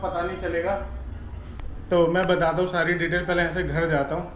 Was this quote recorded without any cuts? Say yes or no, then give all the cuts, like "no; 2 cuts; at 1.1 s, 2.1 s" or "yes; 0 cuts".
yes; 0 cuts